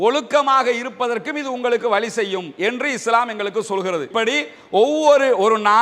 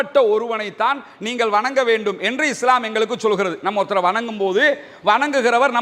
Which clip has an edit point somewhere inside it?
first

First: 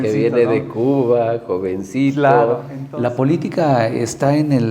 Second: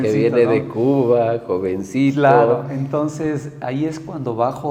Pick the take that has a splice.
first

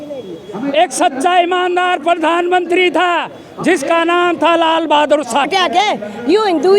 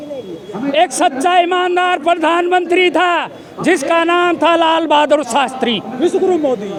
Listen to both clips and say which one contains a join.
first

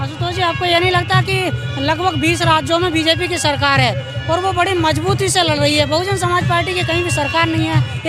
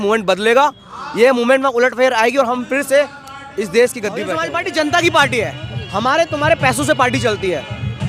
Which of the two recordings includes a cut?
second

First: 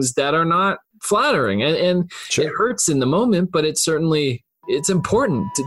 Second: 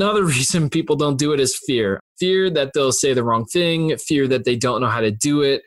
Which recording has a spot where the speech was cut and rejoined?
second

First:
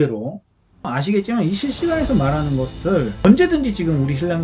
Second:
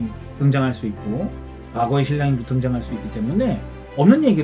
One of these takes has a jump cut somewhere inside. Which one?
first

